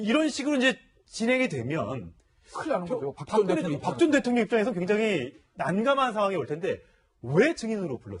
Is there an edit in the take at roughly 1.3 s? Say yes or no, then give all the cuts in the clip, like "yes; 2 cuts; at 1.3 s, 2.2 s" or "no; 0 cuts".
no; 1 cut; at 3.0 s